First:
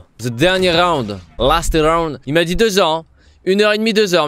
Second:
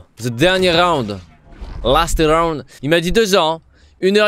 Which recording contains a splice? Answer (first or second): first